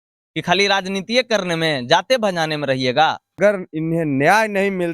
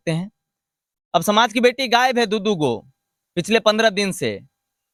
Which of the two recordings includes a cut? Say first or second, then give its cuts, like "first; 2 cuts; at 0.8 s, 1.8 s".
first; 1 cut; at 3.4 s